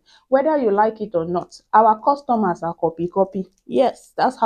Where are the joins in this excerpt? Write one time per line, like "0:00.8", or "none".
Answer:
none